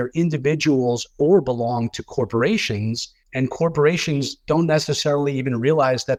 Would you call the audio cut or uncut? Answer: uncut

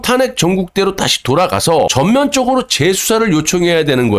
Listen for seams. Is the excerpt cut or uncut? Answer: cut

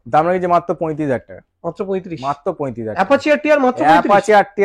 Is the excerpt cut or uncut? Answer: uncut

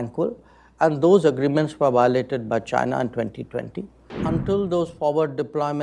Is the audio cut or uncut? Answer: cut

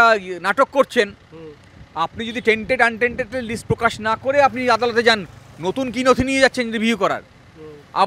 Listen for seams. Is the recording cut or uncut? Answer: uncut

